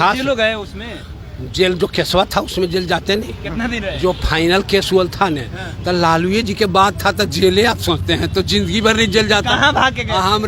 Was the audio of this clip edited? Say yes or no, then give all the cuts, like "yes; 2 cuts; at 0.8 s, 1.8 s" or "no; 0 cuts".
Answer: no; 0 cuts